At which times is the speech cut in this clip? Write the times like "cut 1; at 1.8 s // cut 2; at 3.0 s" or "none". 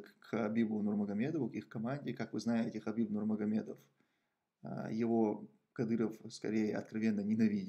none

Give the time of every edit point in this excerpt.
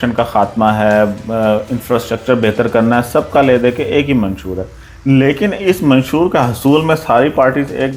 none

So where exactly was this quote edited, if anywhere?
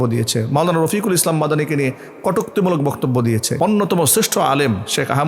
cut 1; at 3.5 s

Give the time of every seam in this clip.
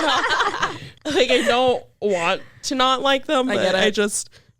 cut 1; at 0.9 s

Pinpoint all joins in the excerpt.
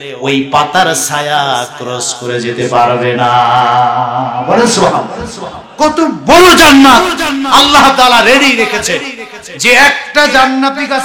none

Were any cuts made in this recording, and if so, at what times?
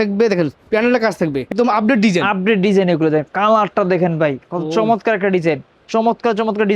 cut 1; at 1.5 s // cut 2; at 5.7 s

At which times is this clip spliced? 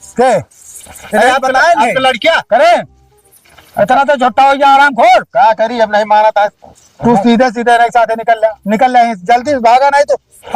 none

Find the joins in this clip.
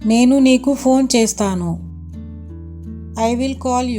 none

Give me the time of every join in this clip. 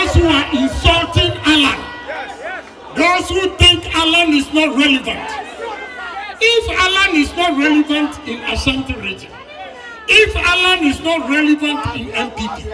none

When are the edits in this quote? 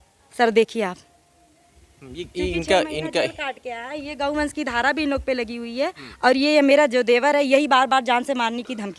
none

